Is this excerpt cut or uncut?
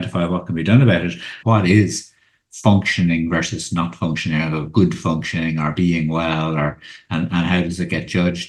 cut